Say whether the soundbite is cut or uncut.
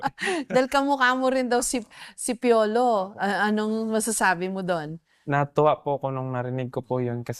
uncut